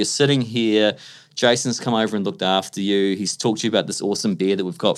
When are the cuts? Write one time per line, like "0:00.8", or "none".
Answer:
none